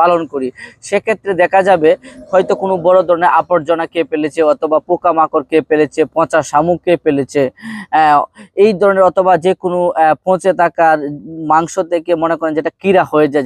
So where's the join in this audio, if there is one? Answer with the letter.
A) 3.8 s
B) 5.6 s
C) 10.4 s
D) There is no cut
D